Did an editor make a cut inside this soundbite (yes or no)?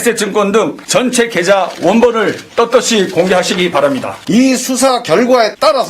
yes